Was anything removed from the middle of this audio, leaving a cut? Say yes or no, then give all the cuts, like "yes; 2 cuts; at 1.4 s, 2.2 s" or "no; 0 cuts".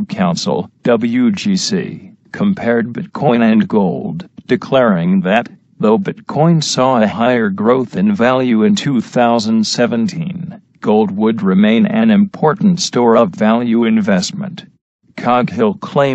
no; 0 cuts